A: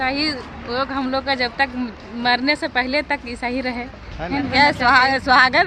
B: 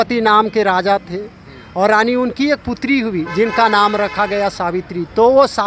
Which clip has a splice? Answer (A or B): A